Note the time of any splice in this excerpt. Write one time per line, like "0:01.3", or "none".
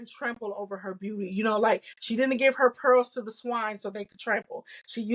none